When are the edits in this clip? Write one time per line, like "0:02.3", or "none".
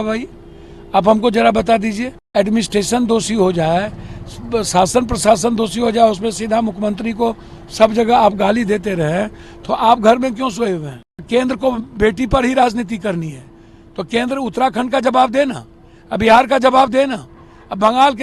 0:02.1
0:11.2